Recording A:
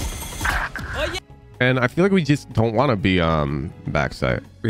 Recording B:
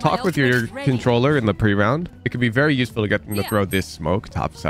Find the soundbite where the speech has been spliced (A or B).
A